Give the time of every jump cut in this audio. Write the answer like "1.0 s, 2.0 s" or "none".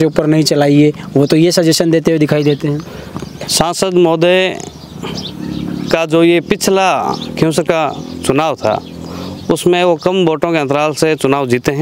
none